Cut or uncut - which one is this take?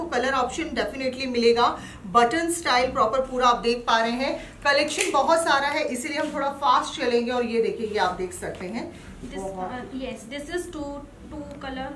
uncut